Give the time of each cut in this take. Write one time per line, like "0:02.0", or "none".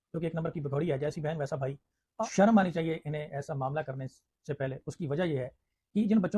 0:02.0